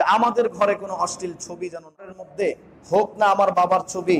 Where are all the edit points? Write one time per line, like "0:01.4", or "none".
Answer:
0:02.2